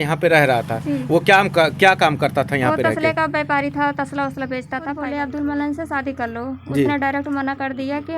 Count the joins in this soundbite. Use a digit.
1